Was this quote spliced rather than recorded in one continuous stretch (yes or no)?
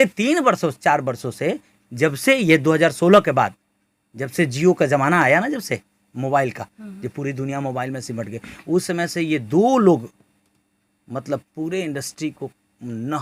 no